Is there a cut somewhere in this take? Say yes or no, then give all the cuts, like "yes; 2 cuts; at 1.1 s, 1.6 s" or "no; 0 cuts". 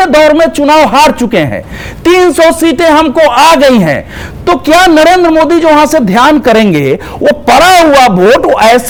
no; 0 cuts